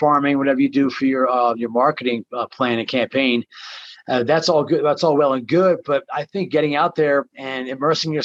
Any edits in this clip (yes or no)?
no